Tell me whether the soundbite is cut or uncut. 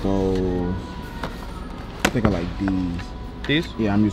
uncut